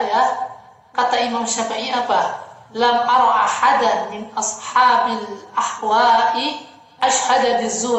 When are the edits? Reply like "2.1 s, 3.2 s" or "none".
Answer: 7.0 s

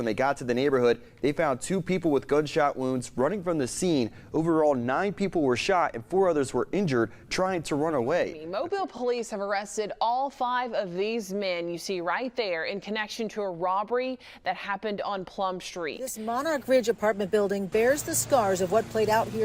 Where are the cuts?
8.8 s, 16.1 s

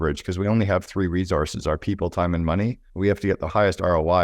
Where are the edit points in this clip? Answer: 3.3 s

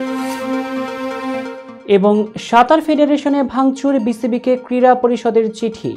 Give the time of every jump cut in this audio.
1.6 s

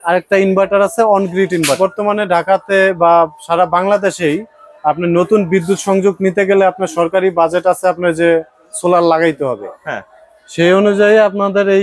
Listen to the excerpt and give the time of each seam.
1.8 s

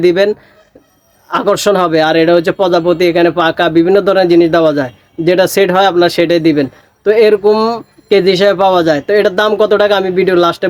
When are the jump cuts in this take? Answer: none

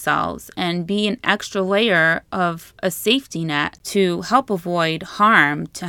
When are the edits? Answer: 3.8 s

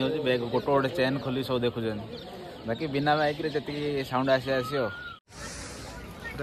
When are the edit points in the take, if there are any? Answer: 5.2 s

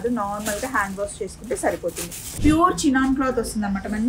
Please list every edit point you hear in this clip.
2.2 s

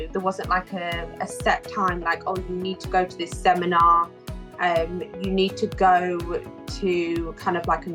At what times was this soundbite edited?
none

